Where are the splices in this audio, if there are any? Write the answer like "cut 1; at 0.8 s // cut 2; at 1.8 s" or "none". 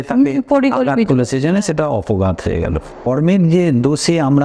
cut 1; at 3.1 s